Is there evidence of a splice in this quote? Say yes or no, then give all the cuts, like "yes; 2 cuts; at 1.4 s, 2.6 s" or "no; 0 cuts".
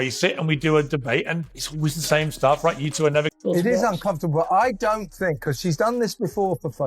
yes; 1 cut; at 3.3 s